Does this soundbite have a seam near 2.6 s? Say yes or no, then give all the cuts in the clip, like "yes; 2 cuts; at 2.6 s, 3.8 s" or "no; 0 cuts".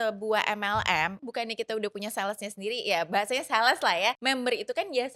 no; 2 cuts; at 1.2 s, 4.2 s